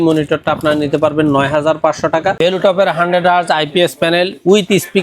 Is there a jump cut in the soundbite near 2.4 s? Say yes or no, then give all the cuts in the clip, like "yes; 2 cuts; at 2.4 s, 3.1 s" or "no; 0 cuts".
yes; 1 cut; at 2.4 s